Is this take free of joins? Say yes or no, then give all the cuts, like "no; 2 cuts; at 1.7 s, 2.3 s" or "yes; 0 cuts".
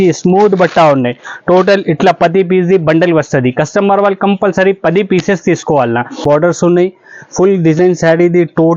no; 1 cut; at 6.2 s